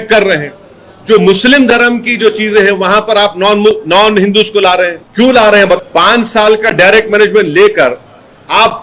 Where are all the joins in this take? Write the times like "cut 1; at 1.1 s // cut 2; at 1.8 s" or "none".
cut 1; at 5.0 s // cut 2; at 5.8 s